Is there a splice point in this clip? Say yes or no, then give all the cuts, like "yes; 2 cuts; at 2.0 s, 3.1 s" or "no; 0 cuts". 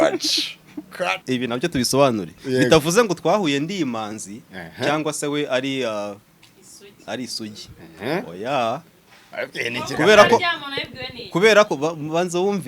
yes; 1 cut; at 1.2 s